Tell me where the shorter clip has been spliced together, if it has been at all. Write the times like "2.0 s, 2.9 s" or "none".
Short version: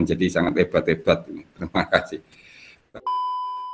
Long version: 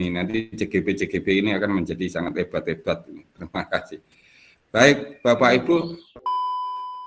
2.8 s